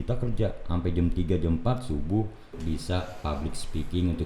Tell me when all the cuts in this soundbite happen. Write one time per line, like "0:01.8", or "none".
0:02.6